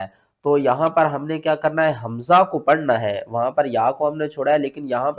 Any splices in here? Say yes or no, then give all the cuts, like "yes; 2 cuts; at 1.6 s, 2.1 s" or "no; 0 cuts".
no; 0 cuts